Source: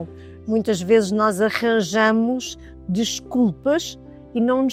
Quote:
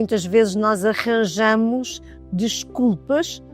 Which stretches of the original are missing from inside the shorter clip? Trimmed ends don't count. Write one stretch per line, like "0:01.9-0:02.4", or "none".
none